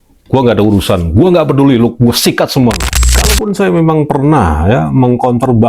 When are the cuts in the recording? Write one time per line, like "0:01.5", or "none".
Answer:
0:02.9

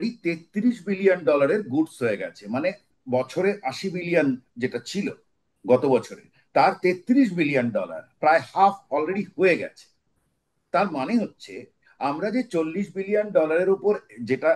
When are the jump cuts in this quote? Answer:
none

